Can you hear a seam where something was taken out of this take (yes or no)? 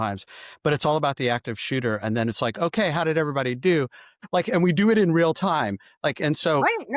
yes